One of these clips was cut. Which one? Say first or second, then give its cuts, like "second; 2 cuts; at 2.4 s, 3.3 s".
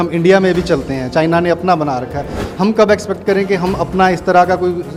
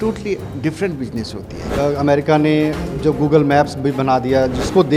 second; 1 cut; at 1.7 s